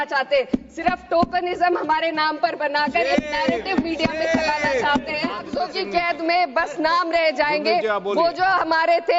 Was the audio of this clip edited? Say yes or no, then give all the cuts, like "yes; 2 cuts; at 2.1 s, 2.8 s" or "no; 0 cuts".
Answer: yes; 1 cut; at 5.5 s